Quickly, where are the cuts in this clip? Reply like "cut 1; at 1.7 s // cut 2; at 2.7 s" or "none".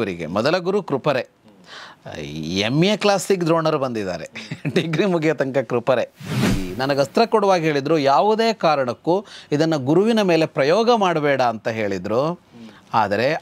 cut 1; at 6.5 s

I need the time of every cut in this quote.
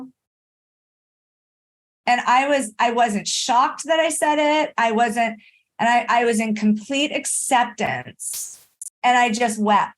cut 1; at 8.8 s

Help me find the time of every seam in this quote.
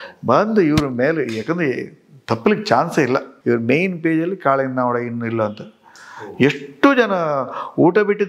cut 1; at 3.3 s

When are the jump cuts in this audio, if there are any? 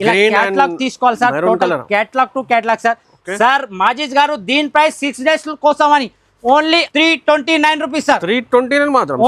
cut 1; at 6.9 s

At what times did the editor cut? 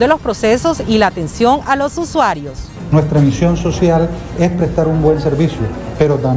cut 1; at 2.6 s

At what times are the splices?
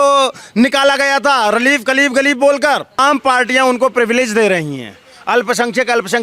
cut 1; at 3.0 s

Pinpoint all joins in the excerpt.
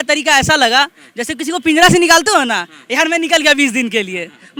none

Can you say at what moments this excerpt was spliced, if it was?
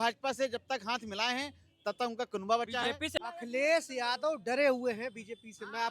cut 1; at 3.1 s

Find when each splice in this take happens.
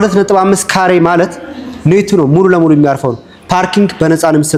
none

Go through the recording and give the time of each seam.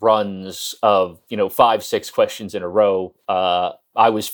cut 1; at 3.4 s

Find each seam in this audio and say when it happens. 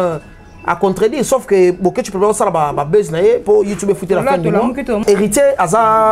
cut 1; at 5.0 s

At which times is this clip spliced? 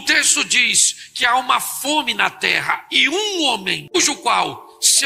cut 1; at 3.9 s

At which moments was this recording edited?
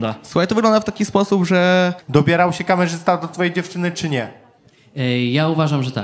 cut 1; at 2.0 s

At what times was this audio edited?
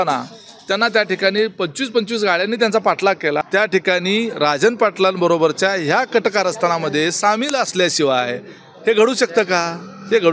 cut 1; at 3.4 s

